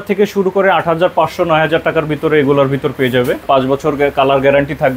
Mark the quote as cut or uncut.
cut